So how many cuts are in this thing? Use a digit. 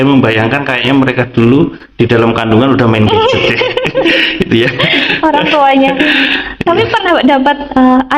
0